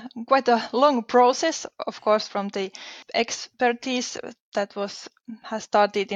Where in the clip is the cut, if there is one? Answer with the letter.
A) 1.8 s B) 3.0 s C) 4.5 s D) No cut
B